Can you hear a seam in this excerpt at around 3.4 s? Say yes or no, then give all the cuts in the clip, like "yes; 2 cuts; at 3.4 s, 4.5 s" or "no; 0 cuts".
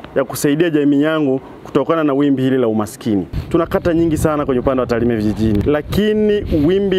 yes; 2 cuts; at 3.4 s, 5.6 s